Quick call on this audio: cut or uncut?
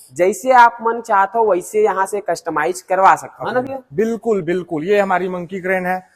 uncut